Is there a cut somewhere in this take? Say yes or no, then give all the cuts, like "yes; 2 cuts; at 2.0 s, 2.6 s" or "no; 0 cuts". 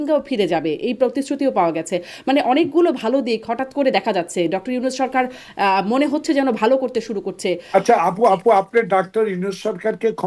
no; 0 cuts